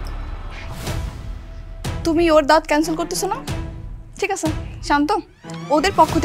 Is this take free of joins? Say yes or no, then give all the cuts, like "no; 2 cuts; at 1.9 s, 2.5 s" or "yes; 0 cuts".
yes; 0 cuts